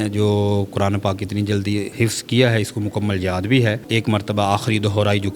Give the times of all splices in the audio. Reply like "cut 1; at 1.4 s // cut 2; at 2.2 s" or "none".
cut 1; at 1.9 s // cut 2; at 3.8 s